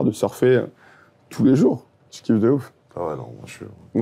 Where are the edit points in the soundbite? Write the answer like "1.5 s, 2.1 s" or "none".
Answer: 2.8 s